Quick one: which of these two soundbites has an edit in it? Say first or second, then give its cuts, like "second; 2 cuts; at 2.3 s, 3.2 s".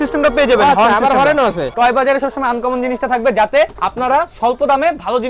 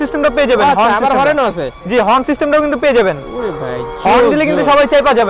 first; 2 cuts; at 1.7 s, 3.8 s